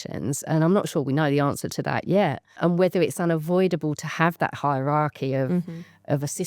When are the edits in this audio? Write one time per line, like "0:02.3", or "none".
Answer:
0:02.6